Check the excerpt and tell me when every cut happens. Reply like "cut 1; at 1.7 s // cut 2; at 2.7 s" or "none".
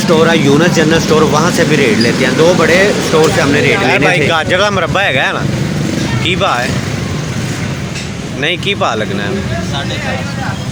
none